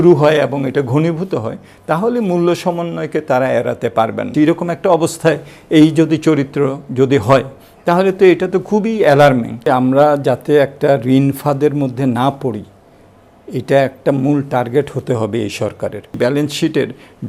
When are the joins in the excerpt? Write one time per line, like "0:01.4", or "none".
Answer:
0:04.3
0:09.6
0:16.2